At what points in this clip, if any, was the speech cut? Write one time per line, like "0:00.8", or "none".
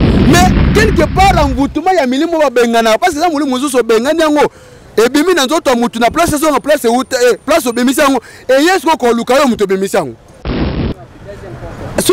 0:10.8